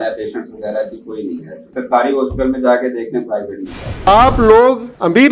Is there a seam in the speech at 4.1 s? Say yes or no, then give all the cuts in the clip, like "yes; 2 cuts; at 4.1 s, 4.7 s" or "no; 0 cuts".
yes; 1 cut; at 4.1 s